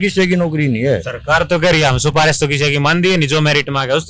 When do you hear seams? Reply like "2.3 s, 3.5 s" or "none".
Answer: none